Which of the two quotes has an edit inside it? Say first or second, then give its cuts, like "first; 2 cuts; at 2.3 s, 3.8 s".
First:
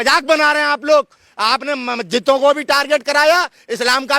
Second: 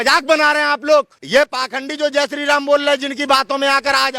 second; 1 cut; at 1.2 s